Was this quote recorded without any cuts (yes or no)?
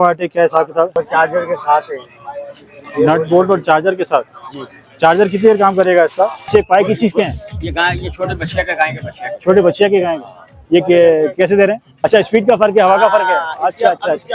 no